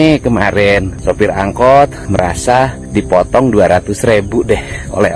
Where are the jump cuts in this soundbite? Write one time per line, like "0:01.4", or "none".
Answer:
0:00.9
0:02.3